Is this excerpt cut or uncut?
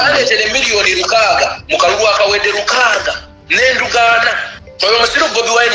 uncut